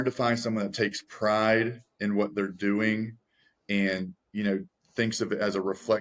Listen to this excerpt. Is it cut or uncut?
uncut